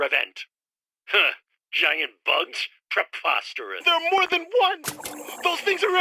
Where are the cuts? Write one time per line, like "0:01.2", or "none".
0:03.8